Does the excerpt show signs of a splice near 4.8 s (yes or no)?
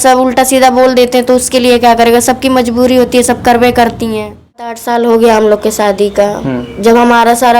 yes